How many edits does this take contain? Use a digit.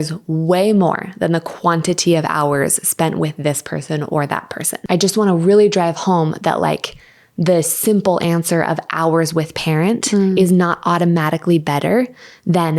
1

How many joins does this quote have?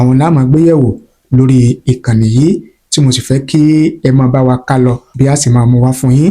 1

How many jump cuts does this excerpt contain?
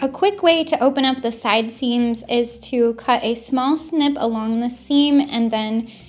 1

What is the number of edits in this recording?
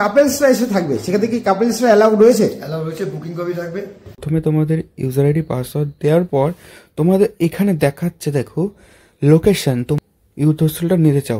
2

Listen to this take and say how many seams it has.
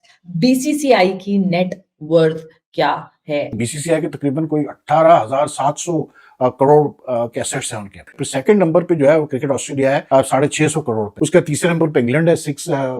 4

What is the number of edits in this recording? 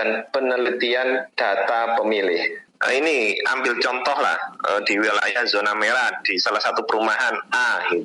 1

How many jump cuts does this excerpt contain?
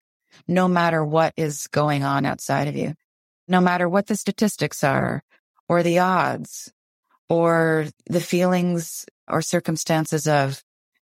3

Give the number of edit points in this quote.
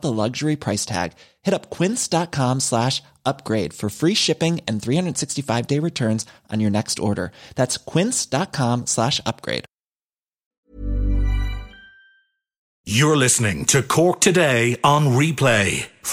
2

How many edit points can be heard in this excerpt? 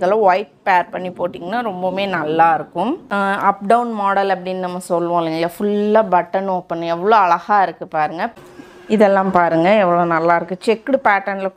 2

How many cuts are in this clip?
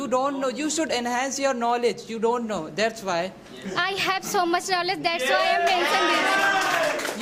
0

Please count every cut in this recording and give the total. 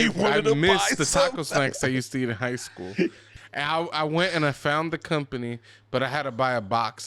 1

